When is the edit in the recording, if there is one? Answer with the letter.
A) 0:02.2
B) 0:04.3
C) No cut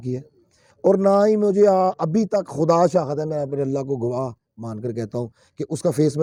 C